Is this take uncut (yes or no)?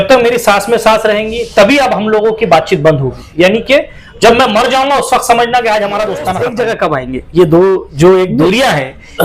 no